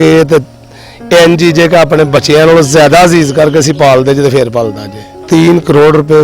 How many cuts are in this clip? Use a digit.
1